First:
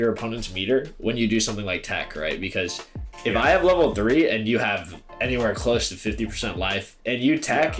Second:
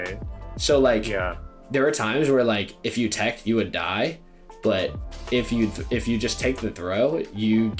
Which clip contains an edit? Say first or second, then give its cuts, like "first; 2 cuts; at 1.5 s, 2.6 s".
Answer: first; 1 cut; at 2.9 s